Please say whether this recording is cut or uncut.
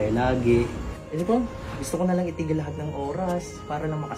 cut